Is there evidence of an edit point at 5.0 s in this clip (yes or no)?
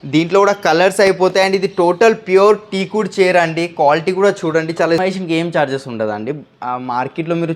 yes